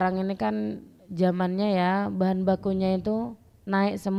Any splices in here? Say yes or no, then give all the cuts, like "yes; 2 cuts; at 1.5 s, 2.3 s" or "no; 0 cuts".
no; 0 cuts